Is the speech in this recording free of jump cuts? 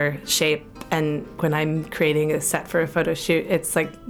no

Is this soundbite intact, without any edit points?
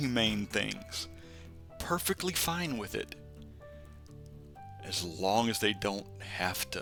yes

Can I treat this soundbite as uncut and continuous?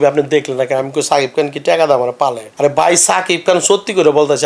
yes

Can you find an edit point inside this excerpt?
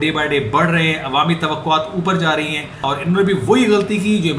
yes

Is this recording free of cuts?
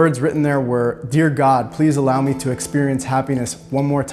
yes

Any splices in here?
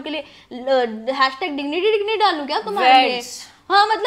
no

